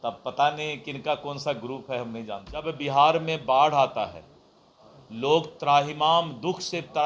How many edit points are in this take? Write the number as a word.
one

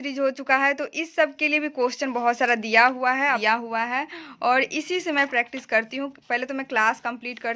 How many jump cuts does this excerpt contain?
one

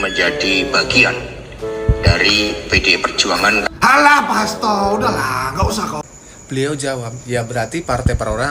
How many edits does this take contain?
one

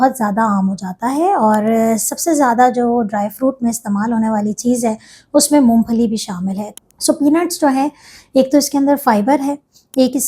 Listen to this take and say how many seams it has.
one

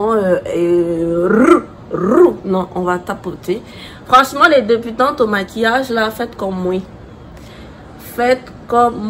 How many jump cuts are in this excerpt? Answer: zero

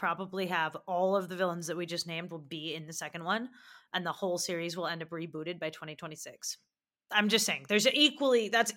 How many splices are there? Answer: zero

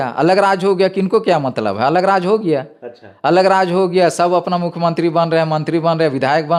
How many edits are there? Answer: zero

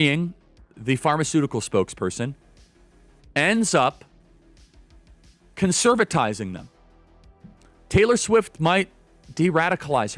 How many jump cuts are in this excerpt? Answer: zero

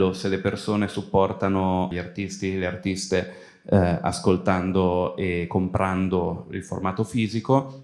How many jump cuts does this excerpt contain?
one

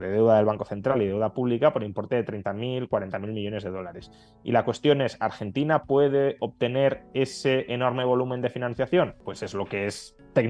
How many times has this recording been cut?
one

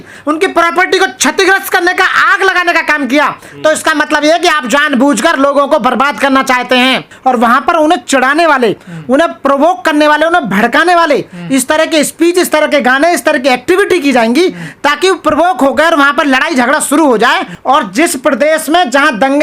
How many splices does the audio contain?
two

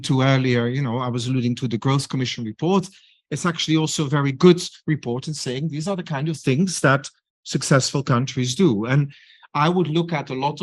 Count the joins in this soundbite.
zero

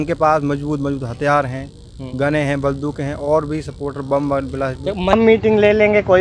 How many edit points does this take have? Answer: one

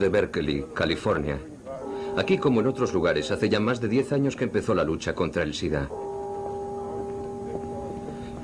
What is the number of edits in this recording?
zero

